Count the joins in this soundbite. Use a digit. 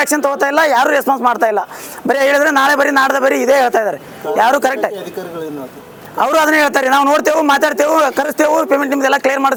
0